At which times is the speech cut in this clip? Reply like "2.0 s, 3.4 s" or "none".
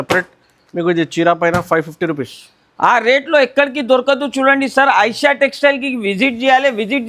none